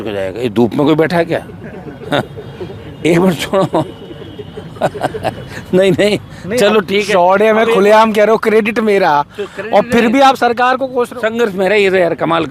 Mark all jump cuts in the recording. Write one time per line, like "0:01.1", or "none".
none